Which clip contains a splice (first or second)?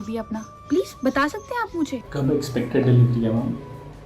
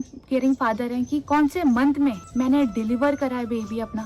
second